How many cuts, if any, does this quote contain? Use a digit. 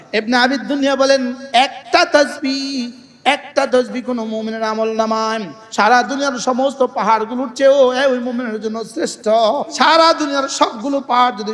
2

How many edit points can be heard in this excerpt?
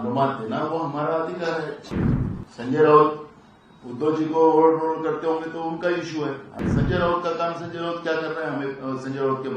2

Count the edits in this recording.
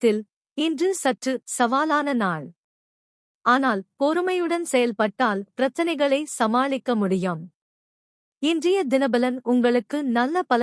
1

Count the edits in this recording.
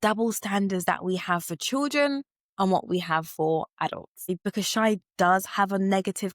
1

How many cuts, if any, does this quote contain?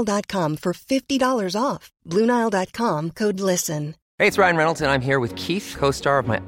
1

